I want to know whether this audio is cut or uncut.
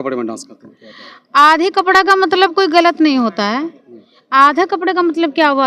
uncut